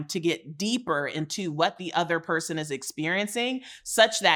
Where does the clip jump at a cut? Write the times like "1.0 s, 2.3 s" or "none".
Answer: none